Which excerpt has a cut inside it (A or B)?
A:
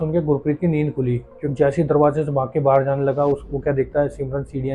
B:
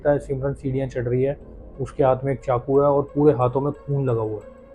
A